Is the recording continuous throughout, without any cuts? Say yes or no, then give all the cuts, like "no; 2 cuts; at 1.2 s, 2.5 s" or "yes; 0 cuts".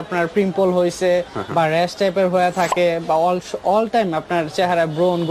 yes; 0 cuts